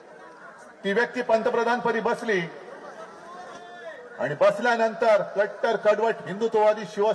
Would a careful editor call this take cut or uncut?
uncut